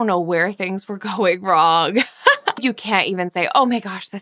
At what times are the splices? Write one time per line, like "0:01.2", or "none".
0:02.6